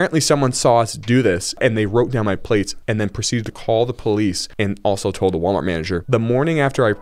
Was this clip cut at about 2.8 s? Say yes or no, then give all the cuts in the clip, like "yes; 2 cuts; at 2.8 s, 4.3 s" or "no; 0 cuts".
yes; 2 cuts; at 2.8 s, 4.5 s